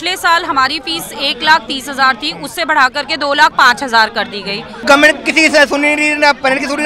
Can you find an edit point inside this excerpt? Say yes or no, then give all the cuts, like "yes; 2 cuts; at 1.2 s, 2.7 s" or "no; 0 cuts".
yes; 1 cut; at 4.8 s